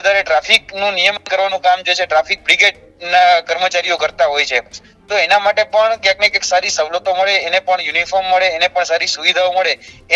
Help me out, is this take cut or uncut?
uncut